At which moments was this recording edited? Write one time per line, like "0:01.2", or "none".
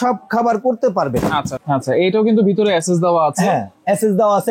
0:01.5